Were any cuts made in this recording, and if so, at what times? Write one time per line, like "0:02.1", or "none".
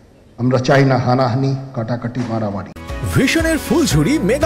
none